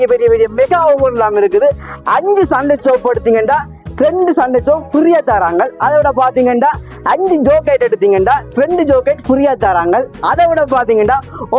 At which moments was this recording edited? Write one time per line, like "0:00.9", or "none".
none